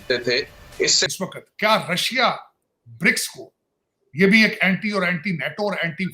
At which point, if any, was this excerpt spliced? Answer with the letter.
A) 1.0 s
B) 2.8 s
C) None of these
A